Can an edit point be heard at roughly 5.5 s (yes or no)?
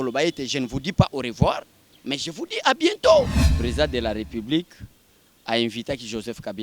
no